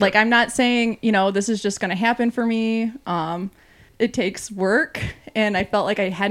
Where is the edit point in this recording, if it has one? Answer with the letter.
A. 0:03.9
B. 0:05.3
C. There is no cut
A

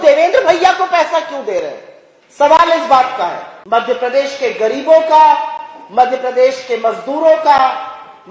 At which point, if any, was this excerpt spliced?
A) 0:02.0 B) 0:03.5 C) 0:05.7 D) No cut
B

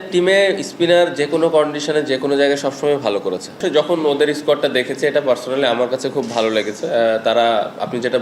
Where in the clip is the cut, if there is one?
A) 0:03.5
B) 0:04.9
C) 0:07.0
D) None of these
A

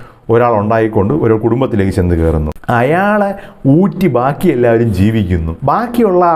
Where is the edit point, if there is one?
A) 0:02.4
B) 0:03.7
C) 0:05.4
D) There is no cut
D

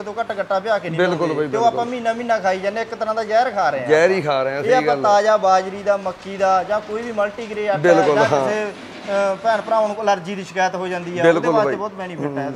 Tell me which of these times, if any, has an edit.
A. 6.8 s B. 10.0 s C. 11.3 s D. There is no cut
D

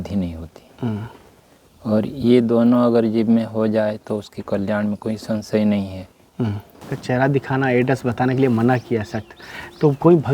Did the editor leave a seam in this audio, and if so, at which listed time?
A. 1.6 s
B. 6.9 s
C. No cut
B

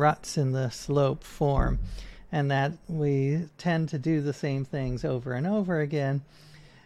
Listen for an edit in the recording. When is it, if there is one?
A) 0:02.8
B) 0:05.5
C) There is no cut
A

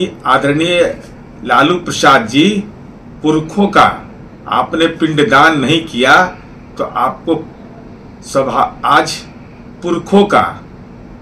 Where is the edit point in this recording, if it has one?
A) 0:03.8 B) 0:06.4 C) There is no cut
C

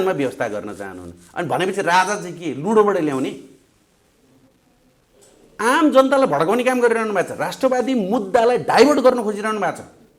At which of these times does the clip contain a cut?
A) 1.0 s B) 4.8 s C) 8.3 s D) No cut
D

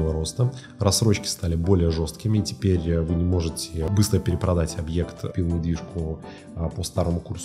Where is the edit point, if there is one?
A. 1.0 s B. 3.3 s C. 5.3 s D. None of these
C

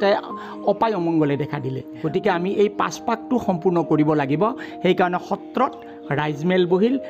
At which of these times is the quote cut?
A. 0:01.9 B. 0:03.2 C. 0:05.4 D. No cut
A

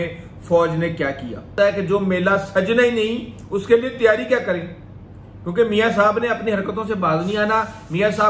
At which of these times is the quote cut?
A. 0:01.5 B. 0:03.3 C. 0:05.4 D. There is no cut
A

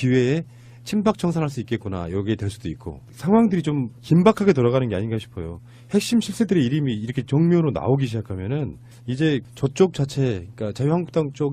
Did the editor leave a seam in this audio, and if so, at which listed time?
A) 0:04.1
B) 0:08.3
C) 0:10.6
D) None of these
B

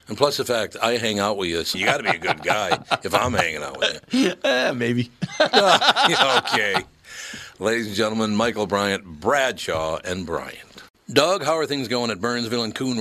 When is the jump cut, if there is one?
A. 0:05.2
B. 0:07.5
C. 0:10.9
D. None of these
C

